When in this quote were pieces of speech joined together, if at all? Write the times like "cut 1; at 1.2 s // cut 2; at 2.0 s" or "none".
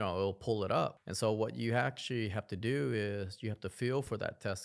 cut 1; at 1.0 s